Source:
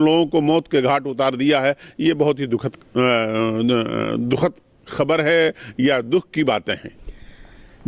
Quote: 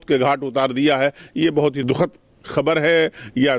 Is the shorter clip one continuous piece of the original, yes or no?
no